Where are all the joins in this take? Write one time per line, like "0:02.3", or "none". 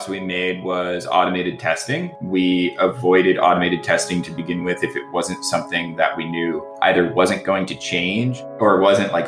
0:06.7
0:08.4